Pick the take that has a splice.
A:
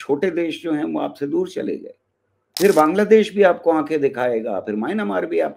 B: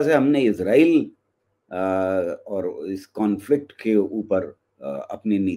A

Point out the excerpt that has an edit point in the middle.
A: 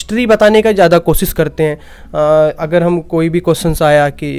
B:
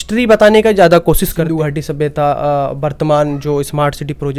B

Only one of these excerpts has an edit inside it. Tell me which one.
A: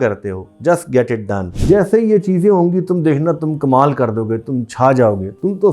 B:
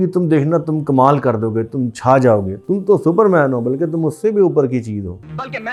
A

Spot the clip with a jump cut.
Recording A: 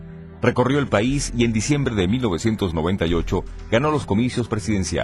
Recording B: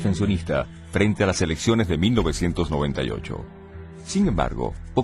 B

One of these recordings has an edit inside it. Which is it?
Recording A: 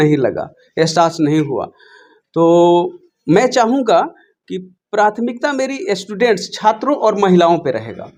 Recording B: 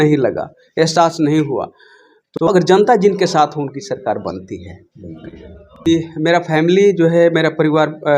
B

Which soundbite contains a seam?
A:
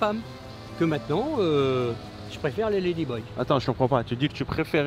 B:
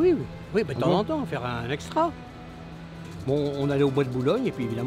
B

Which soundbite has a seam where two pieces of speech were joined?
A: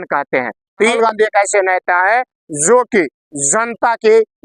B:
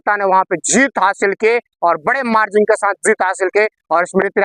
A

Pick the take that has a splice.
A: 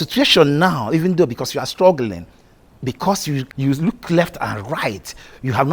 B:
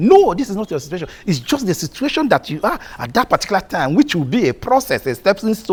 A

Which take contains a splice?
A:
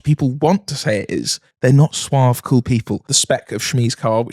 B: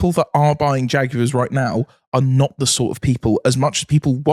A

